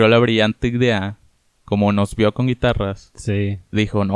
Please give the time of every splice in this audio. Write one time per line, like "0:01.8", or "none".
none

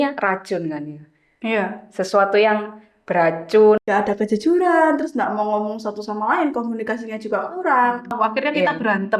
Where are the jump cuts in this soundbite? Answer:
0:03.8
0:08.1

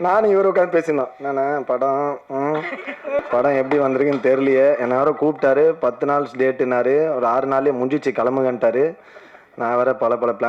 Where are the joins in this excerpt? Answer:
0:03.2

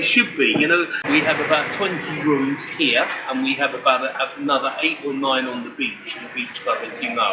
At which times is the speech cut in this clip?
0:01.0

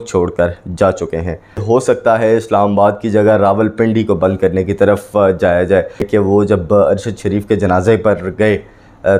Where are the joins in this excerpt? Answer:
0:01.6
0:06.1

